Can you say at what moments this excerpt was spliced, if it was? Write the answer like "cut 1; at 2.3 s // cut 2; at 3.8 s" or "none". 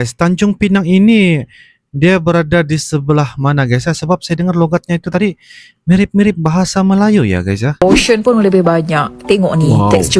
cut 1; at 7.7 s